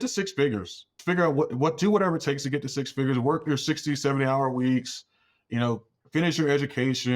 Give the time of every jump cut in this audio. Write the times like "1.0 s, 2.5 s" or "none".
0.9 s